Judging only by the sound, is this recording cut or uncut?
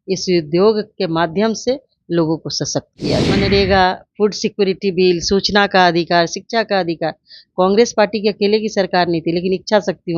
cut